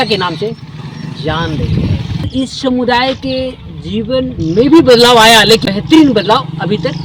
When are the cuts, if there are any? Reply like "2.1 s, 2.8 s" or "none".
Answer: 2.2 s, 5.7 s